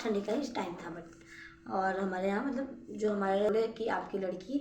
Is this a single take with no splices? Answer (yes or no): no